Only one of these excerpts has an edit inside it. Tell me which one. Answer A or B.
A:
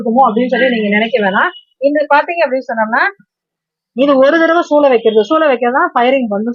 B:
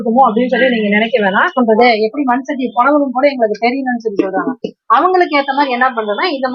B